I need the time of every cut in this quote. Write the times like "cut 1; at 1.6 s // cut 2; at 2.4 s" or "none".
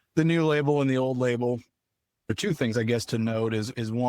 cut 1; at 2.4 s